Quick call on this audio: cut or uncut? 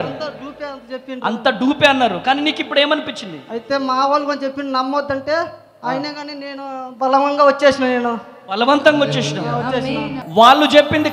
cut